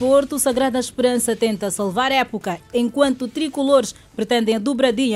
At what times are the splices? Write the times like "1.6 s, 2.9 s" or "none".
2.6 s